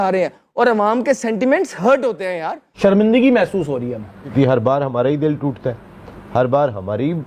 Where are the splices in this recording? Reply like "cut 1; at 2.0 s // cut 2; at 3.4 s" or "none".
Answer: cut 1; at 2.8 s // cut 2; at 4.3 s